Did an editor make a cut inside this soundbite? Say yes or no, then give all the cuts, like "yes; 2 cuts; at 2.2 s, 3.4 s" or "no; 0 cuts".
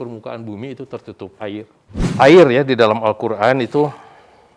yes; 1 cut; at 2.0 s